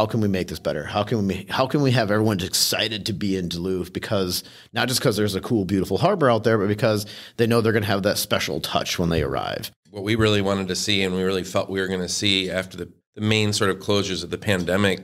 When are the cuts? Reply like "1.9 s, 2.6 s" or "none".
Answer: 9.7 s